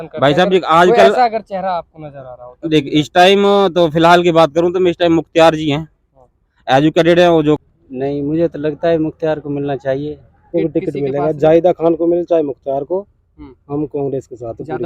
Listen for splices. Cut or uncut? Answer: cut